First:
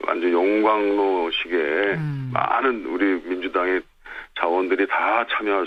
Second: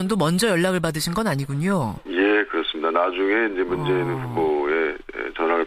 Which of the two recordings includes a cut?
second; 1 cut; at 2.4 s

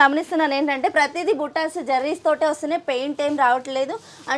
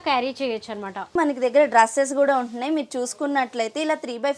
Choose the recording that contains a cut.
second; 1 cut; at 1.1 s

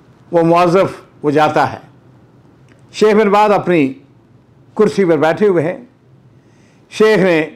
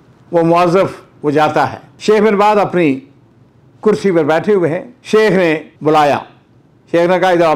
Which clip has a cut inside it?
second; 3 cuts; at 1.9 s, 4.9 s, 5.7 s

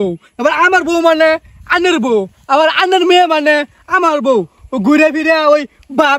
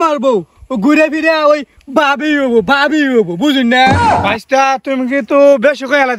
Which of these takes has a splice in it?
second; 1 cut; at 4.1 s

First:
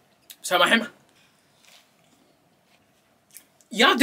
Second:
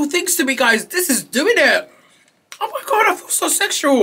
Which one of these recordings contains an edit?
first; 2 cuts; at 1.2 s, 2.8 s

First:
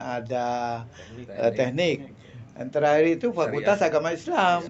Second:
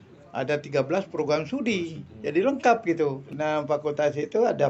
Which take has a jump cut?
second; 1 cut; at 3.2 s

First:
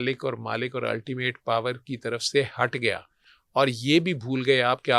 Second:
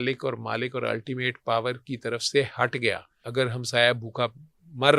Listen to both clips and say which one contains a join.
second; 1 cut; at 3.2 s

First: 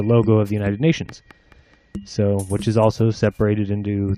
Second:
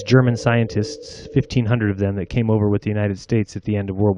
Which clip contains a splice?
second; 1 cut; at 1.1 s

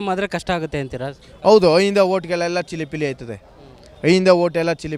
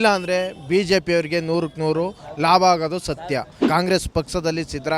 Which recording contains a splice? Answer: second; 1 cut; at 3.5 s

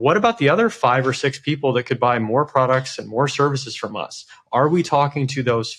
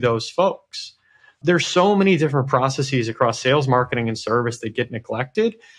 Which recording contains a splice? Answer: second; 1 cut; at 1.3 s

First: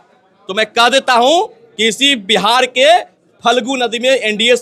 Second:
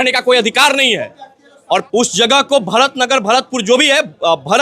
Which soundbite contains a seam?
second; 1 cut; at 1.9 s

